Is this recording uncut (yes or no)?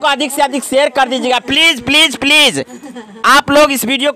yes